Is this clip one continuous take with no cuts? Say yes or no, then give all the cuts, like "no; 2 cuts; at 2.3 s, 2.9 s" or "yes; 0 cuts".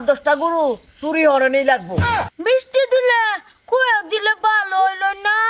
no; 1 cut; at 2.0 s